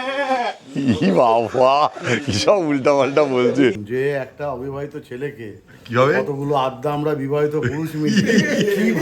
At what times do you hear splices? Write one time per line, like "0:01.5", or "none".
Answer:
0:03.8